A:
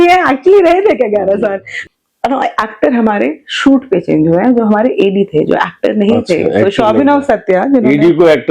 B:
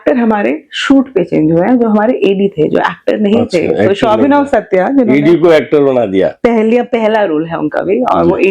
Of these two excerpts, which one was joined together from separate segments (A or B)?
A